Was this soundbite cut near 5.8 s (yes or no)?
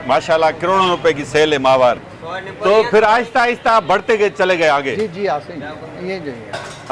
no